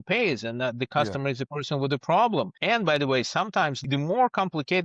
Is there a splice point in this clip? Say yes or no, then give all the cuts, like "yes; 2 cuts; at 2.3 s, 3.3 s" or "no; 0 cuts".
yes; 2 cuts; at 2.6 s, 3.8 s